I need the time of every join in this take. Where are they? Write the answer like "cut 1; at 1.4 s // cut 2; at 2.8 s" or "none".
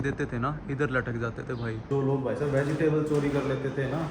cut 1; at 1.9 s